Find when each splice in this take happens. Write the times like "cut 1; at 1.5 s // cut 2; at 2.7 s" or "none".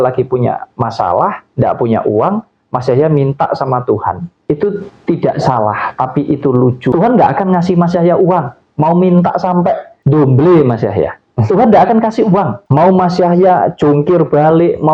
cut 1; at 4.3 s // cut 2; at 6.9 s // cut 3; at 9.9 s // cut 4; at 12.6 s